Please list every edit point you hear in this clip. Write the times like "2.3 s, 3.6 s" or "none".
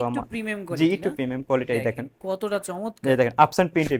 none